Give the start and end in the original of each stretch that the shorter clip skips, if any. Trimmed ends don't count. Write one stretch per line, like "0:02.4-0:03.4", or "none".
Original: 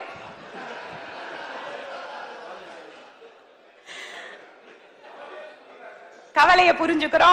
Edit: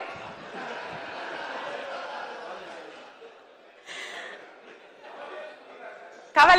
none